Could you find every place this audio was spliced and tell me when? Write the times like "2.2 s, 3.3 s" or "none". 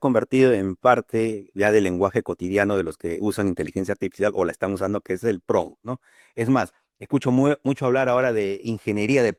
none